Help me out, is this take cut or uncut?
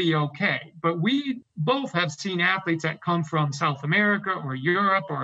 cut